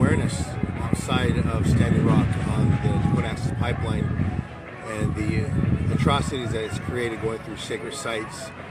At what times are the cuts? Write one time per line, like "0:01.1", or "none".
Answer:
0:03.4